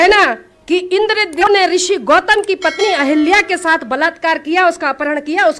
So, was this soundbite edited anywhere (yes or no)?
yes